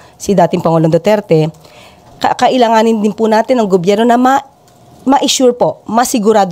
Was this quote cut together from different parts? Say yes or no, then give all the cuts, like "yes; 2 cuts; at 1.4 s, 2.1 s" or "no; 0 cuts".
no; 0 cuts